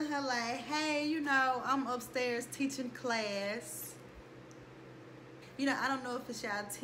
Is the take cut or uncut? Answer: uncut